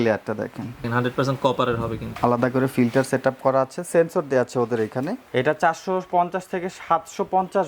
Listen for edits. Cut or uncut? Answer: cut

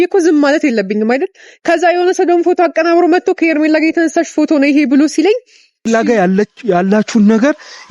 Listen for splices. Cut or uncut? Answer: cut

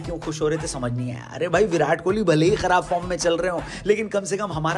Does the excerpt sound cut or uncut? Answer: uncut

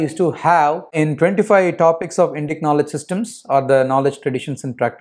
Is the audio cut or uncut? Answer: cut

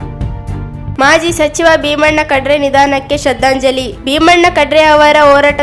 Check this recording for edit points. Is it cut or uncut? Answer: cut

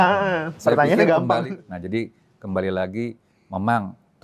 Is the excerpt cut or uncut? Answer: cut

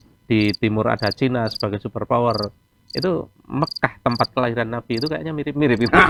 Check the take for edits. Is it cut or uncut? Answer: uncut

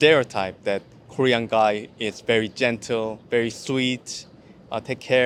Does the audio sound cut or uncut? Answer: uncut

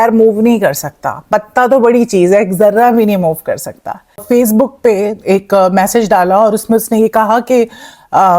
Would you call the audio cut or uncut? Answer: cut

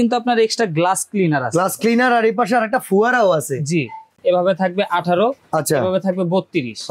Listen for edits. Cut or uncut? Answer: cut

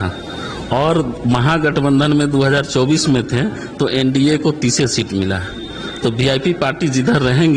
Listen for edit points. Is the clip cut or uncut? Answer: uncut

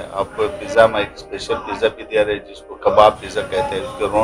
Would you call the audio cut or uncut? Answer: uncut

